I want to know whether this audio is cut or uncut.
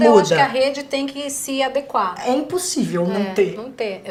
uncut